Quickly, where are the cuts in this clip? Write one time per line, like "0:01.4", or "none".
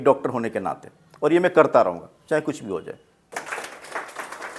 0:03.2